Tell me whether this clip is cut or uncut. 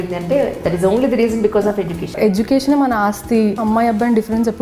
cut